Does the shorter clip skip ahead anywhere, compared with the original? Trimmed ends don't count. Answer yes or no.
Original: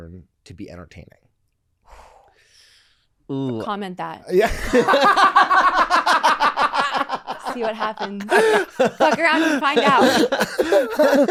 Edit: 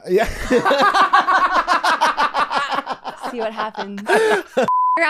no